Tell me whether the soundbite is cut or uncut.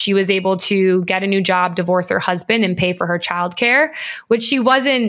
uncut